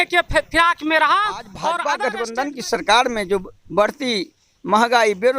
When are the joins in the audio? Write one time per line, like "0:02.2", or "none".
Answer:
0:01.9